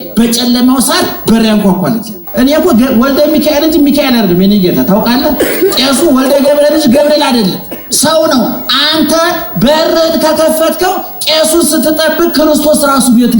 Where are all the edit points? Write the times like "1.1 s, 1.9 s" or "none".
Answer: 2.2 s